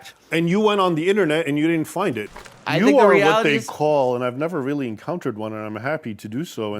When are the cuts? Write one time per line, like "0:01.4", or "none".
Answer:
0:02.3